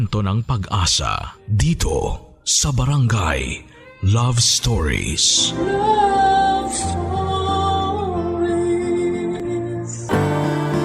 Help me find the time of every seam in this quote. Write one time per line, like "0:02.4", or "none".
0:10.0